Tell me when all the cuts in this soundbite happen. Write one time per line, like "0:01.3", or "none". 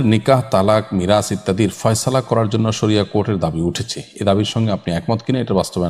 none